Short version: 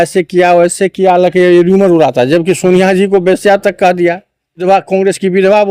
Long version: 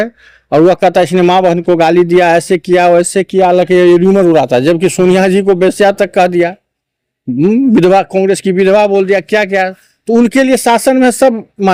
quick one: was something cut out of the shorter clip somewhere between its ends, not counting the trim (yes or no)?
yes